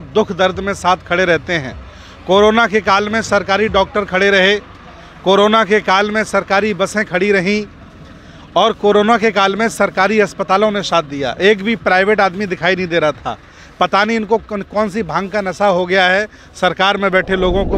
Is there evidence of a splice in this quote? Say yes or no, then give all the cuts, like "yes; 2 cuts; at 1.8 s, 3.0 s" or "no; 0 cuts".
no; 0 cuts